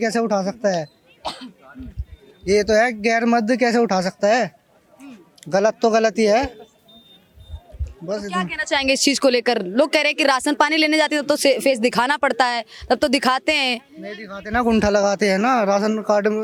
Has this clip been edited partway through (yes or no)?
no